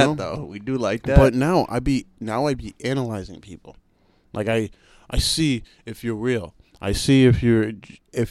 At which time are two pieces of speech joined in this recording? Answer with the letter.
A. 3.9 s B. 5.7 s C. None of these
C